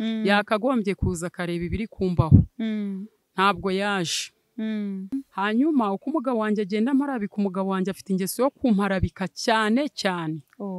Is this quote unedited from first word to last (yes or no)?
no